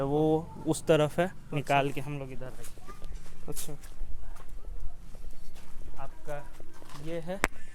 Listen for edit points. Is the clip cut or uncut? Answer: uncut